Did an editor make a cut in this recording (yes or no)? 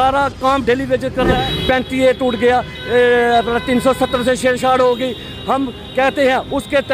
yes